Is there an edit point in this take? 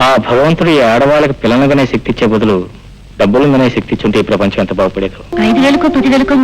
yes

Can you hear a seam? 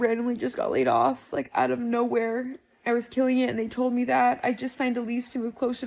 no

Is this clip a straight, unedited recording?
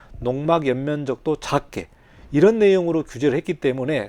yes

